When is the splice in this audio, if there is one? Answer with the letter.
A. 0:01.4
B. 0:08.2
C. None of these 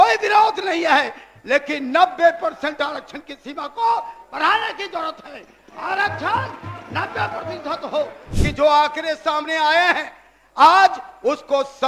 B